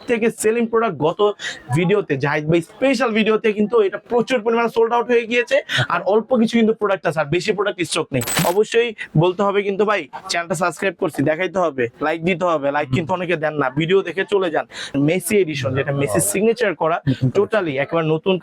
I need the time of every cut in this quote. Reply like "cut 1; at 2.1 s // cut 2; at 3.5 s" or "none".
cut 1; at 8.4 s // cut 2; at 14.9 s